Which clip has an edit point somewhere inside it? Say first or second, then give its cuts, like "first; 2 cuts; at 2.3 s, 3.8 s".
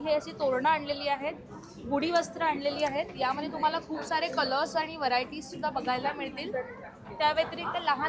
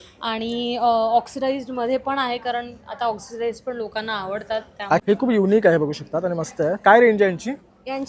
second; 1 cut; at 5.0 s